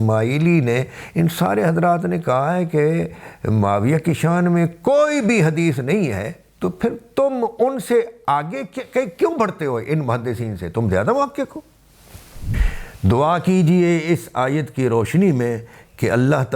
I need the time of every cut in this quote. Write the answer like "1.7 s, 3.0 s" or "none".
12.5 s